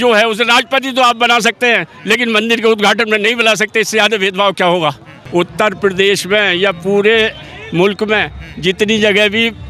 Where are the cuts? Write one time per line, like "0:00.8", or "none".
0:05.2